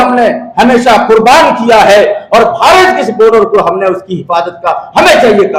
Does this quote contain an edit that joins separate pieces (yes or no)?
no